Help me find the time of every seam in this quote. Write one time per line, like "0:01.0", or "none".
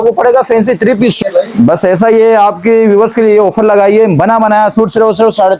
0:01.2